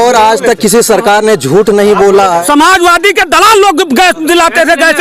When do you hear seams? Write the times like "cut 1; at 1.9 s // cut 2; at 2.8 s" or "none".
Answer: cut 1; at 2.4 s